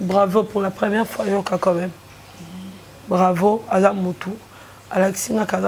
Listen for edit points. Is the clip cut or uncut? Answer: uncut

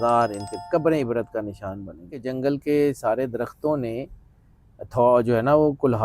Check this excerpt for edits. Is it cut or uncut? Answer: cut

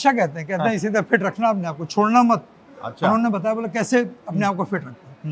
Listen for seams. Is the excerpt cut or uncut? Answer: uncut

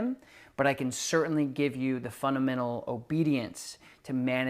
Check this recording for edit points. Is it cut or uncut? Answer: uncut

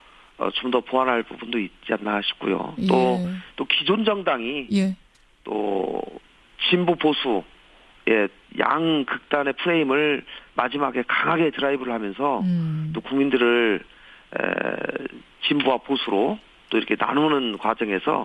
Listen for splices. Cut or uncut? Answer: cut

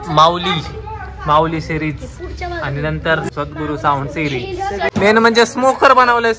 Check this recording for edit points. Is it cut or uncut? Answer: cut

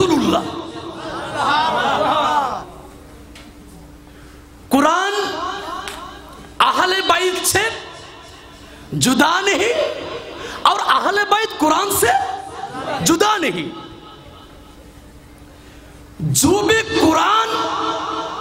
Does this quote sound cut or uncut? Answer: uncut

